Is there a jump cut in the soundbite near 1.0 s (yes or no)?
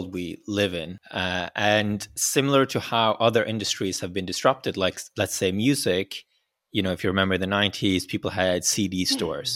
yes